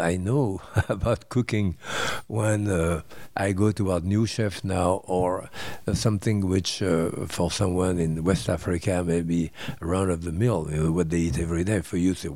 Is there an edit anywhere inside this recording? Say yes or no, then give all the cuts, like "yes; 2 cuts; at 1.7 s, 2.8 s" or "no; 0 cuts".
no; 0 cuts